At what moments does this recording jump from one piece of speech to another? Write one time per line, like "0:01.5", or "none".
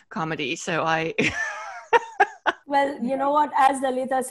0:02.6